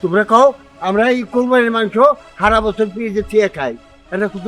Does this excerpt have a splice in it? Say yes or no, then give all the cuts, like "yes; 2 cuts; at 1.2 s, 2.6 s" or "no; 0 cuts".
no; 0 cuts